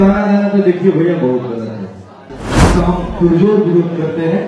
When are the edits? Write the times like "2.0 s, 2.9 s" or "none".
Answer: 2.4 s